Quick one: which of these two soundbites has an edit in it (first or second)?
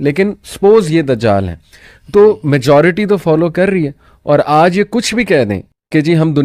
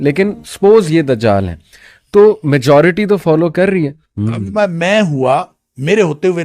second